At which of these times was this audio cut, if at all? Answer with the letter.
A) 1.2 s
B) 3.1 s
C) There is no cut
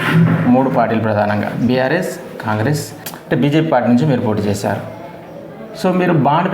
B